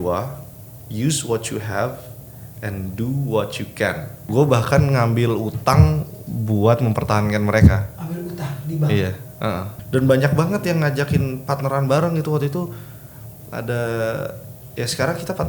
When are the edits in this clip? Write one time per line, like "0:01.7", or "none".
0:04.1
0:09.7